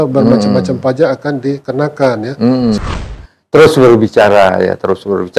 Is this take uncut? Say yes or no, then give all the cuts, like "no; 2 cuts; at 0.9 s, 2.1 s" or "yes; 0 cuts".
no; 1 cut; at 3.0 s